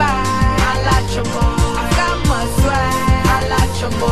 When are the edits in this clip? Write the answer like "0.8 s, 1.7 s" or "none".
none

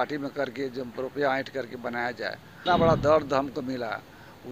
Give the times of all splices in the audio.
2.6 s

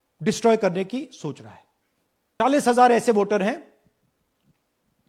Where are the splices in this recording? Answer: 2.4 s

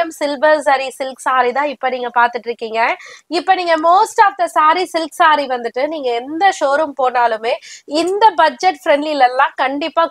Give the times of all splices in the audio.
none

